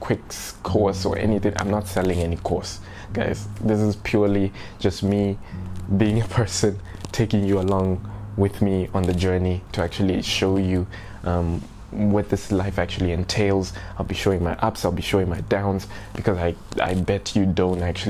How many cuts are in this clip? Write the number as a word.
zero